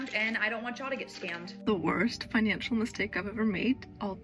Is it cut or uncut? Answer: cut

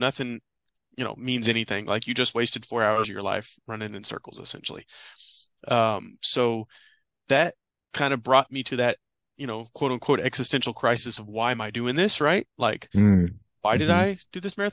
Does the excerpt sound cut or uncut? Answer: uncut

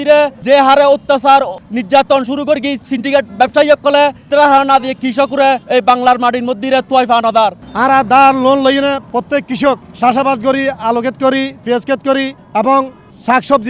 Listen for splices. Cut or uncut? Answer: cut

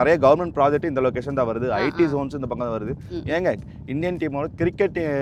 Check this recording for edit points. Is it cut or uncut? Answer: uncut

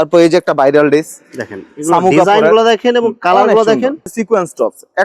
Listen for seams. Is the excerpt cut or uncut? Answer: cut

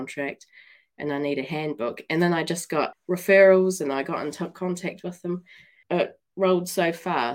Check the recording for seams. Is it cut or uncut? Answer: cut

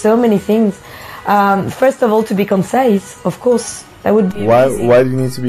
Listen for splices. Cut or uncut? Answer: cut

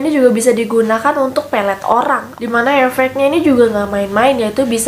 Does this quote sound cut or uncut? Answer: cut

